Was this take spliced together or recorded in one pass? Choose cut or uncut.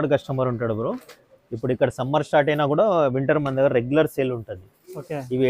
uncut